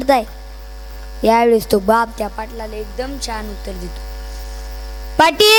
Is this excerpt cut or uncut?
uncut